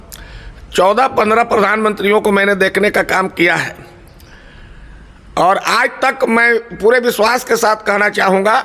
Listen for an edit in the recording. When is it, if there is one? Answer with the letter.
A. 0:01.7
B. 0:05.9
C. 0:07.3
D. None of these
D